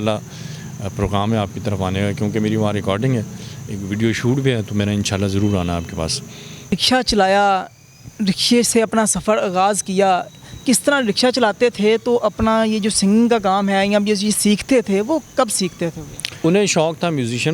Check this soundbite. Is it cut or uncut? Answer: cut